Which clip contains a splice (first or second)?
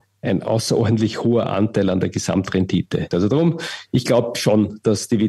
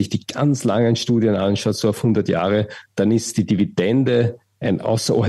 first